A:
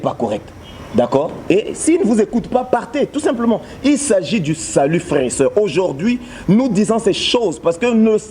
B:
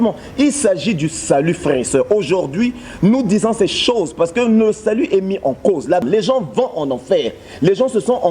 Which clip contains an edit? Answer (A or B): B